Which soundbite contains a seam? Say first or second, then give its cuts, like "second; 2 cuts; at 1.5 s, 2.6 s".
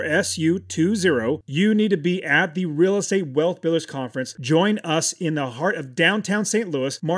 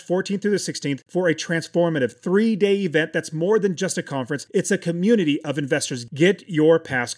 first; 1 cut; at 1.4 s